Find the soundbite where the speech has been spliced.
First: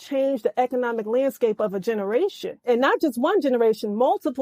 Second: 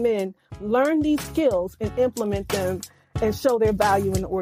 first; 1 cut; at 2.6 s

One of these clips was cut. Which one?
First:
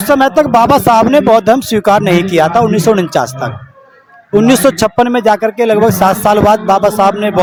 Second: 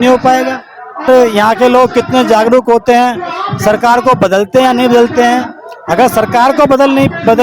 second; 1 cut; at 1.1 s

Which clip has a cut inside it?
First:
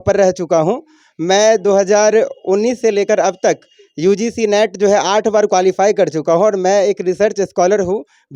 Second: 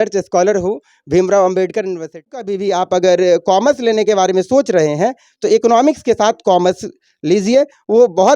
second; 1 cut; at 2.4 s

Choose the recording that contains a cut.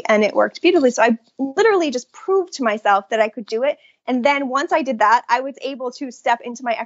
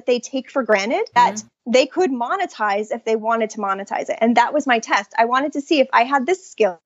second; 1 cut; at 1.2 s

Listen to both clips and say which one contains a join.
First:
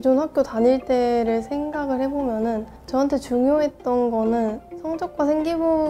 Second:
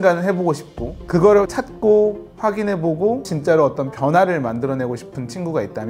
second; 2 cuts; at 1.5 s, 3.3 s

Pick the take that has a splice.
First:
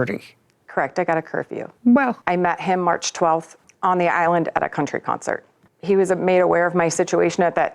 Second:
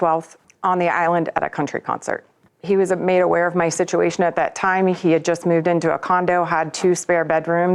first; 1 cut; at 2.2 s

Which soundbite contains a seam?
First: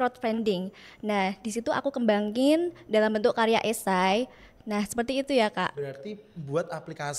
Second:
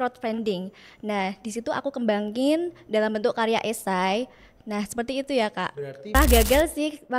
second; 1 cut; at 6.1 s

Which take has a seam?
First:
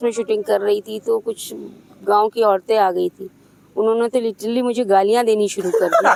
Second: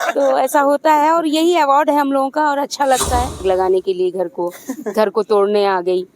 second; 1 cut; at 3.4 s

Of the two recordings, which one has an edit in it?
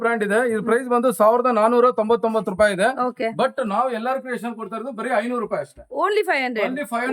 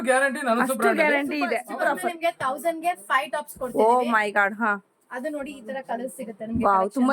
second; 1 cut; at 1.6 s

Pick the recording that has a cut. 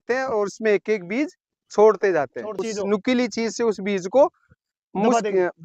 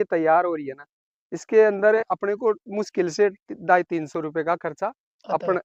first; 1 cut; at 2.7 s

